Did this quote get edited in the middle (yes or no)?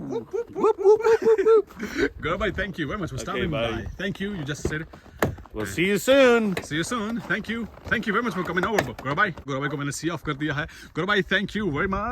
no